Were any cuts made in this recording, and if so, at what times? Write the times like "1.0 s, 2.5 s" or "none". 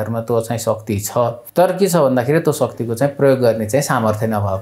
1.4 s